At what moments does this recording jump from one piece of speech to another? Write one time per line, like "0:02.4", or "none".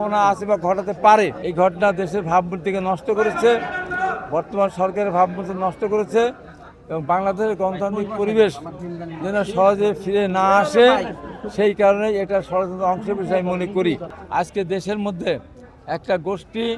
0:01.4
0:14.1